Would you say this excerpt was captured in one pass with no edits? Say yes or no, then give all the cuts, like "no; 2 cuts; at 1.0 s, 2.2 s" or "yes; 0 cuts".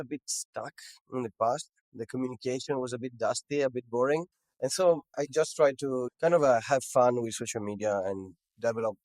no; 2 cuts; at 4.4 s, 6.1 s